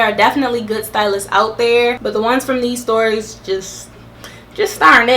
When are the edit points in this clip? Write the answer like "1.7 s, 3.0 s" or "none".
2.0 s